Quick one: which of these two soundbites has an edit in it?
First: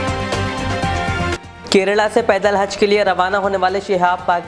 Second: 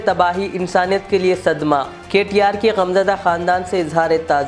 first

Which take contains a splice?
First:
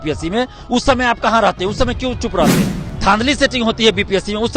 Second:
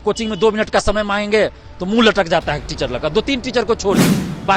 first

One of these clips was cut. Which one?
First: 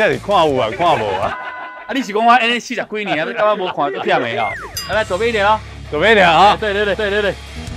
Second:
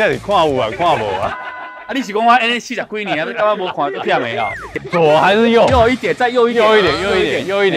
second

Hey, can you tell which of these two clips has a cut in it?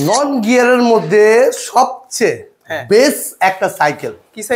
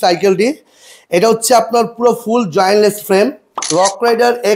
second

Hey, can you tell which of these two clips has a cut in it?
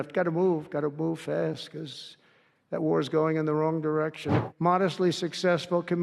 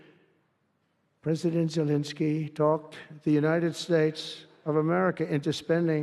first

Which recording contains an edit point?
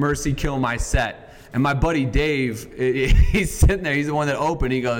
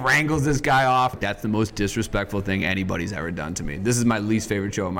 second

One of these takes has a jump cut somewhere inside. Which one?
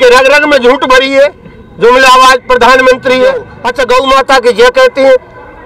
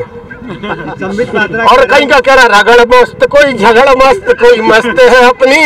first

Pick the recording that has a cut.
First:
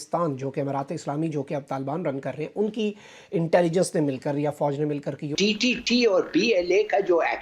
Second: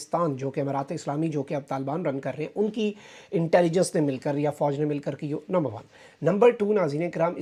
first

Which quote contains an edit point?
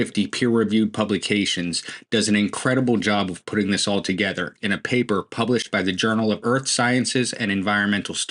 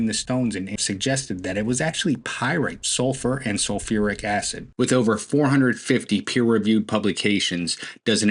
second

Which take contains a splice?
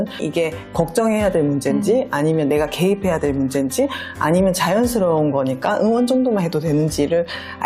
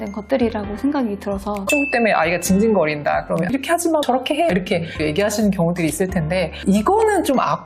second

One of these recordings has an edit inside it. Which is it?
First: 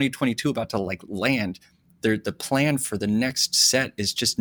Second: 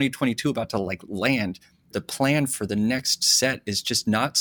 second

